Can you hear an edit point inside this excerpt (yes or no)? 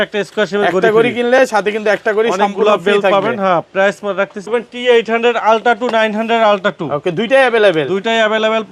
yes